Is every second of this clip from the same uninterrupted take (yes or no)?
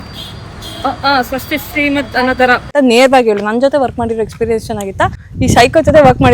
no